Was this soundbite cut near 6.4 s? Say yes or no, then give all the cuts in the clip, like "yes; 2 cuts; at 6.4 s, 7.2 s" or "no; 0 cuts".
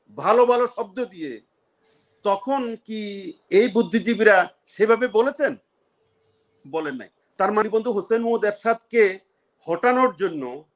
no; 1 cut; at 7.6 s